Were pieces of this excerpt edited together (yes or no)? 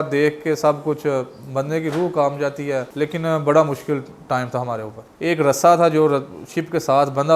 yes